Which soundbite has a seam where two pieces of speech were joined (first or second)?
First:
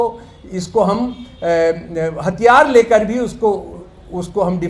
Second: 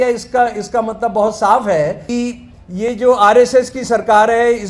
second